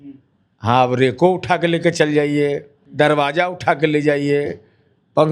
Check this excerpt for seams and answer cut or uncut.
cut